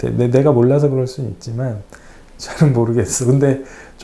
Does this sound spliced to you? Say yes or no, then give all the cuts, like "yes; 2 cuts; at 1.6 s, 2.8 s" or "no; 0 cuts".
no; 0 cuts